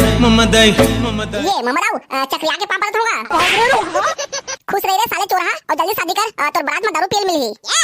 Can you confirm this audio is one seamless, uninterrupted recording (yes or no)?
no